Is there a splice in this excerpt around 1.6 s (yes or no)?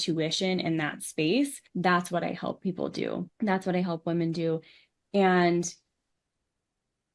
yes